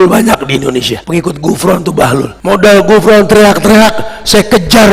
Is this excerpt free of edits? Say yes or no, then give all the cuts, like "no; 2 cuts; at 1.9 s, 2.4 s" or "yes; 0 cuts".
no; 2 cuts; at 1.0 s, 2.3 s